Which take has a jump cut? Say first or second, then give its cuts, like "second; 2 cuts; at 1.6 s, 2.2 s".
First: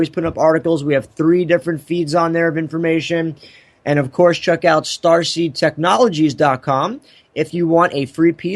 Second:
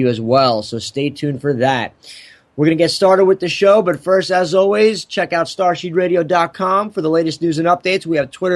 second; 1 cut; at 6.7 s